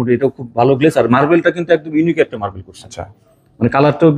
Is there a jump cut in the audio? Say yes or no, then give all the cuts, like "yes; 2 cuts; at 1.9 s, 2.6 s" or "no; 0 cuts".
no; 0 cuts